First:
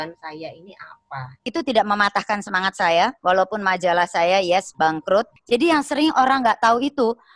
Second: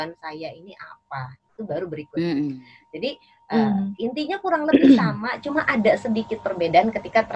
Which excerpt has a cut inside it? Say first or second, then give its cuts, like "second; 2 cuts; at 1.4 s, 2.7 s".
first; 2 cuts; at 1.4 s, 5.4 s